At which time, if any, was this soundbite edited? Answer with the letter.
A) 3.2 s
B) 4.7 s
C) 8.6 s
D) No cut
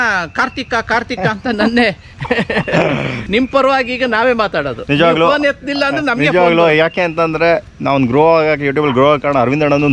A